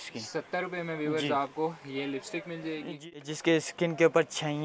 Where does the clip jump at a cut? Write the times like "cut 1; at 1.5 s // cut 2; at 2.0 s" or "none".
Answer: cut 1; at 2.9 s